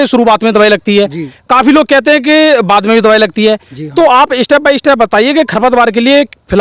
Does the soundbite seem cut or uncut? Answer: uncut